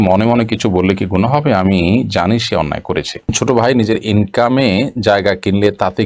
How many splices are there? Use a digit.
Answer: 1